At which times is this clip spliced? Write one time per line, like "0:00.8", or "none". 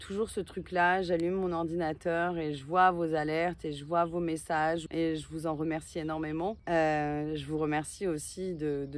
0:04.9
0:06.6